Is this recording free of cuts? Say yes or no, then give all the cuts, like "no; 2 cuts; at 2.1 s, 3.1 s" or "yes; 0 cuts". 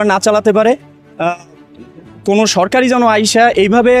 yes; 0 cuts